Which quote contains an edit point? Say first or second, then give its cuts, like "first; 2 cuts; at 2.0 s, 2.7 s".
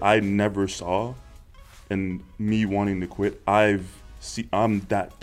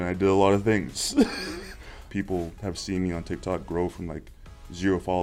second; 1 cut; at 2.1 s